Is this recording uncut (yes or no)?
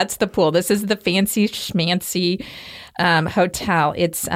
yes